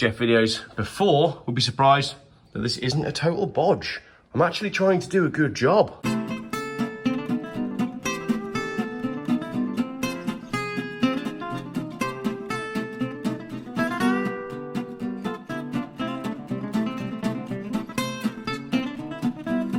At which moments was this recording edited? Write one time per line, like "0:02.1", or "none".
none